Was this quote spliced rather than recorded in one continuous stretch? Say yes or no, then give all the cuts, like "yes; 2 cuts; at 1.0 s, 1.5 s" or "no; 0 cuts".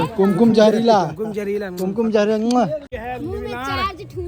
yes; 1 cut; at 2.8 s